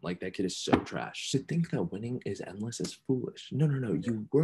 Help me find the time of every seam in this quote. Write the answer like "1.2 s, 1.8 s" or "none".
1.1 s